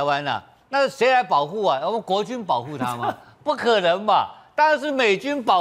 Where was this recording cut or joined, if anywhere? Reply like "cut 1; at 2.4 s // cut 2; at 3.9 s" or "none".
none